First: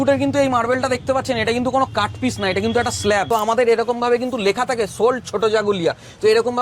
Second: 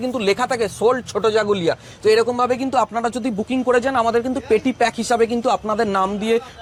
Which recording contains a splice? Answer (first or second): first